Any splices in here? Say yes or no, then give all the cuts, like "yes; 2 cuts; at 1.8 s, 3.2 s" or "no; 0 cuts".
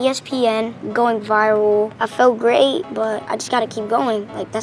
yes; 1 cut; at 3.2 s